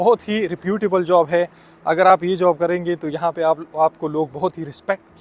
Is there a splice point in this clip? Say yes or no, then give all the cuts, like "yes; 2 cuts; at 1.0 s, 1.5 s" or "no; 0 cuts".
no; 0 cuts